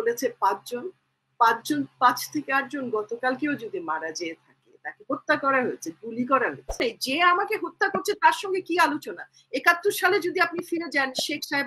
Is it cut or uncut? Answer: cut